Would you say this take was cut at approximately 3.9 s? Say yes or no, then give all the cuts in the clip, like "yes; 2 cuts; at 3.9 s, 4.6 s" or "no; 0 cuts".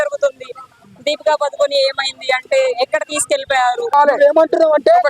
yes; 1 cut; at 3.9 s